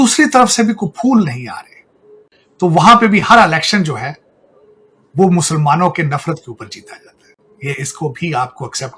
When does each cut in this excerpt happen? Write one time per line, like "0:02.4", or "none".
none